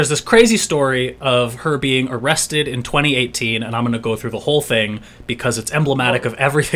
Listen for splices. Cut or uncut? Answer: uncut